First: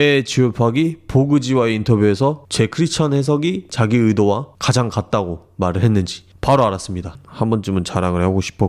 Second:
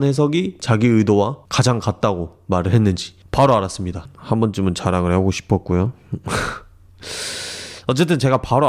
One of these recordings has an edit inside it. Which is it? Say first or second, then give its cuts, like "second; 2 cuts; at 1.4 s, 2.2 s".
second; 1 cut; at 7.7 s